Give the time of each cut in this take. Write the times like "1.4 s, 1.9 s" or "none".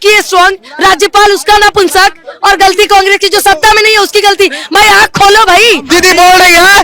5.9 s